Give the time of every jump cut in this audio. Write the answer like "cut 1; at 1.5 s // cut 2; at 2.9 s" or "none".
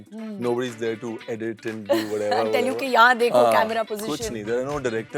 none